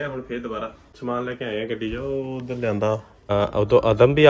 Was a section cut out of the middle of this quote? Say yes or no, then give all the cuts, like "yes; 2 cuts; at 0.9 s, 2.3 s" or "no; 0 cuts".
yes; 1 cut; at 3.3 s